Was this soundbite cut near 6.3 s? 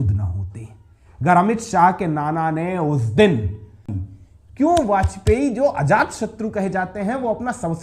no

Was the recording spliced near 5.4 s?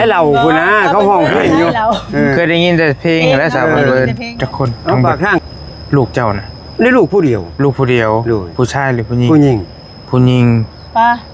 yes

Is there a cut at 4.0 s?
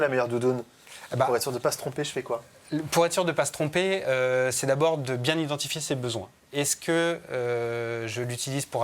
no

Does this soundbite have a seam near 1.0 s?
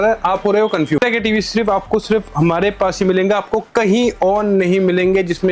yes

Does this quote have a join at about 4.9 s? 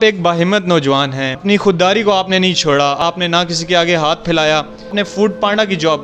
yes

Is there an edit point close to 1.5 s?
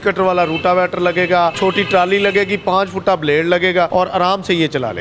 yes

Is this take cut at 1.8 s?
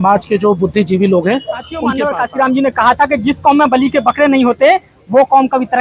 yes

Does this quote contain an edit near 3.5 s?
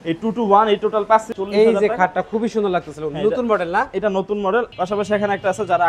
no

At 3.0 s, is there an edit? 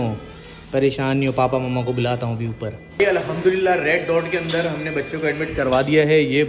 yes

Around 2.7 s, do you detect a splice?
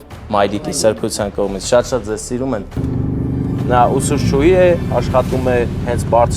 yes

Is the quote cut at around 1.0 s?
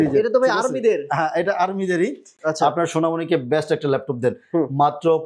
no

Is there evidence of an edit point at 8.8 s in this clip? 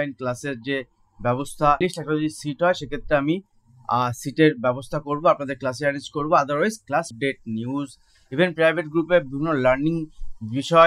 no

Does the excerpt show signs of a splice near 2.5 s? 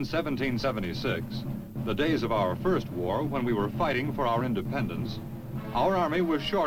no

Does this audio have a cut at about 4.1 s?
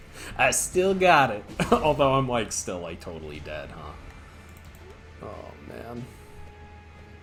no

